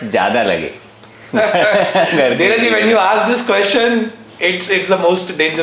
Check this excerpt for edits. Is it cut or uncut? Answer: uncut